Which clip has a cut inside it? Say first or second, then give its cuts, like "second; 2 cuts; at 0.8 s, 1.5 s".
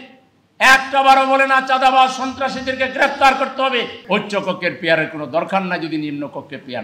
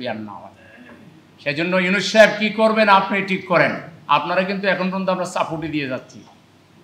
first; 1 cut; at 4.0 s